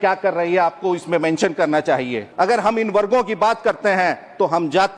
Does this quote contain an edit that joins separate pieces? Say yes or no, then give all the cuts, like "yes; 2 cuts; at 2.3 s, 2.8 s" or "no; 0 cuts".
yes; 1 cut; at 2.2 s